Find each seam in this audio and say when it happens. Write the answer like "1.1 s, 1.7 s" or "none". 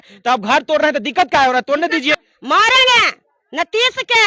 2.1 s